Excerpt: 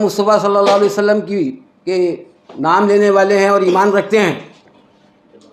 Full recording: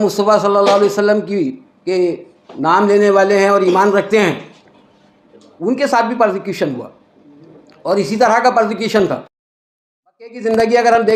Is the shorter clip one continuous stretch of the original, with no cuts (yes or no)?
yes